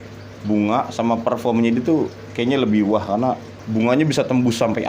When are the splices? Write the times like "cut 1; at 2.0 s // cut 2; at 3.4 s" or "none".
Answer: cut 1; at 3.5 s